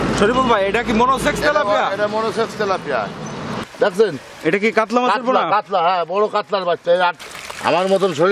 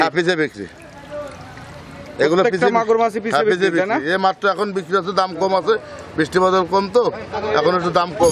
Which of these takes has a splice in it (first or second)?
first